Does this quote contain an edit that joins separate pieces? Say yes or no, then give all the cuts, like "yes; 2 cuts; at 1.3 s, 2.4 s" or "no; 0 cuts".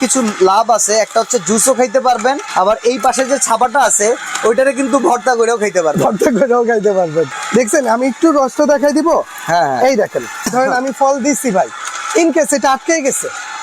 yes; 3 cuts; at 2.4 s, 7.4 s, 10.5 s